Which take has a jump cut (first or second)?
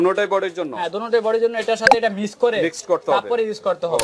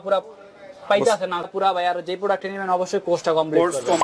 second